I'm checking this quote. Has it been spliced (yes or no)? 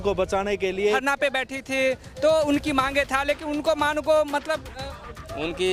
yes